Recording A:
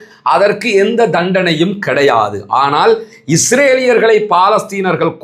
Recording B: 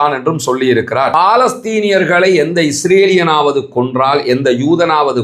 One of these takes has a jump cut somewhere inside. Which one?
B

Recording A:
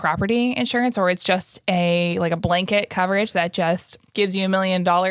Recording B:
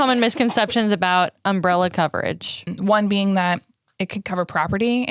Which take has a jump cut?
B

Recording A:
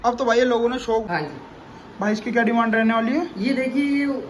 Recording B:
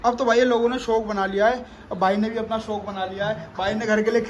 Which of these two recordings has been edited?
A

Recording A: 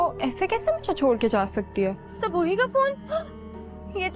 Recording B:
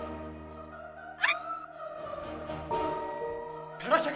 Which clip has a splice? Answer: A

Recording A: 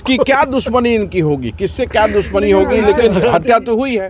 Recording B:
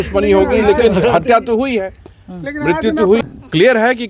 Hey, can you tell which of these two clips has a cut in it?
B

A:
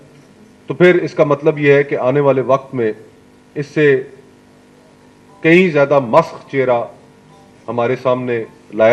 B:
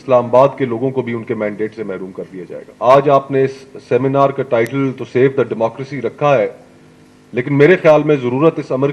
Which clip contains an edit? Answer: B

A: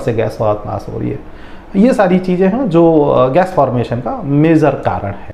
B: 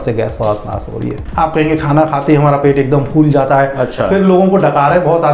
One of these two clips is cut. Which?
B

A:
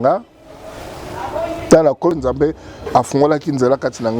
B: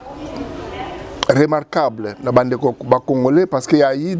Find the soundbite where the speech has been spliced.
A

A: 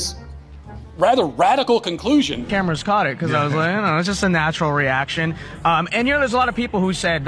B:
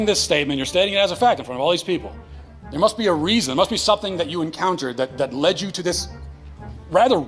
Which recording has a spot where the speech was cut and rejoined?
A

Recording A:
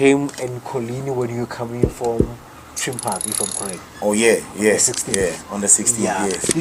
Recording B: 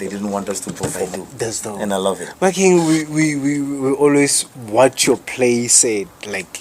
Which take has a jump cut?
B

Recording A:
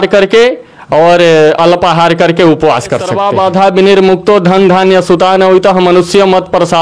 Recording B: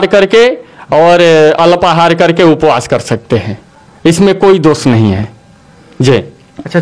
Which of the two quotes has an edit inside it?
A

